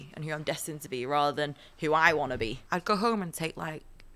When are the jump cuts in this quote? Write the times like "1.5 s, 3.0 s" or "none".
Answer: 2.6 s